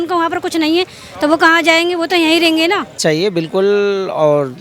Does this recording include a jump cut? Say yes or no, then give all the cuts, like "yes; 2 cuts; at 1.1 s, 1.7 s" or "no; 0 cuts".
yes; 1 cut; at 3.0 s